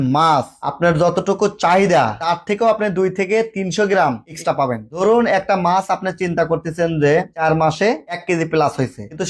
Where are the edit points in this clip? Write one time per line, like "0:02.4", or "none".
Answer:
0:08.1